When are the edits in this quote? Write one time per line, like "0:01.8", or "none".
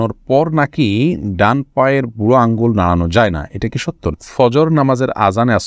0:04.1

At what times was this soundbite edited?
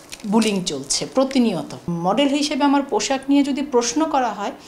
0:01.8

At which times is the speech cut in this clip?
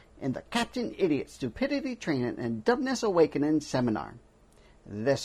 none

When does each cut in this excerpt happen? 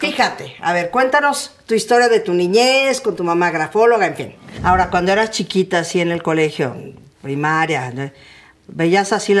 0:04.4

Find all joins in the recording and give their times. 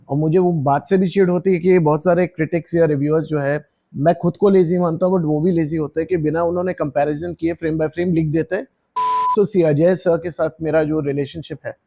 0:03.9
0:09.1

